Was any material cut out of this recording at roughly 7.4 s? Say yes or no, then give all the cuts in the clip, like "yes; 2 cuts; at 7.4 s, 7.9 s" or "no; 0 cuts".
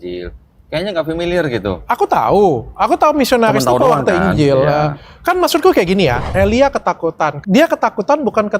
yes; 2 cuts; at 6.2 s, 7.4 s